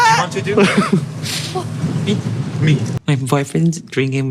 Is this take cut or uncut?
cut